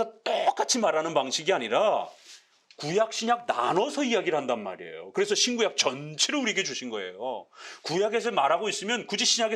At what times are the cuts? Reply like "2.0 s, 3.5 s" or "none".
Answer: none

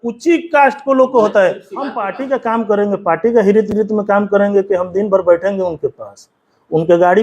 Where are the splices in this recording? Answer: 2.0 s

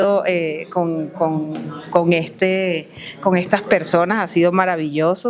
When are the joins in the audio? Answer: none

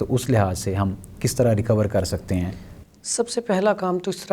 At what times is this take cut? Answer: none

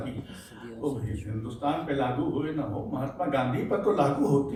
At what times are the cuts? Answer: none

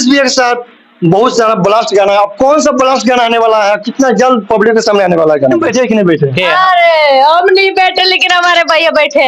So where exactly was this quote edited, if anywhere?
5.6 s

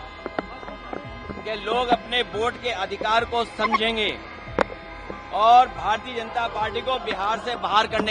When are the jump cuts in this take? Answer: none

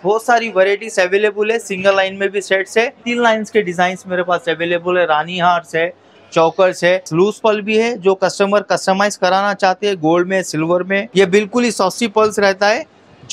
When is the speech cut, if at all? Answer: 3.0 s, 7.1 s, 11.1 s

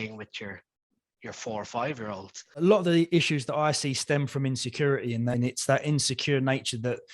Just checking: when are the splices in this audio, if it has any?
2.4 s

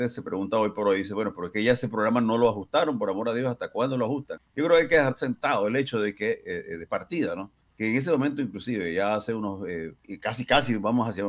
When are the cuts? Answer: 4.4 s, 7.6 s, 10.0 s

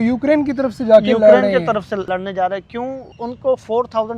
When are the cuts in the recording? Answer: 2.1 s, 3.1 s

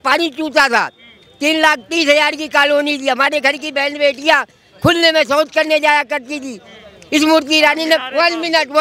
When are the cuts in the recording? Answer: none

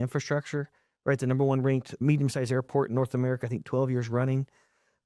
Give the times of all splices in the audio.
2.0 s

